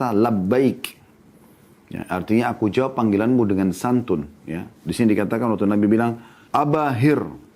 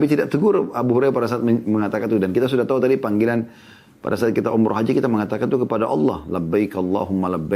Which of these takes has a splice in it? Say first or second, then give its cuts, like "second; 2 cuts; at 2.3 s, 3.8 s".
first; 1 cut; at 6.3 s